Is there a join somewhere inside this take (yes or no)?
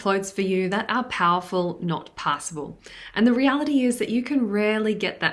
no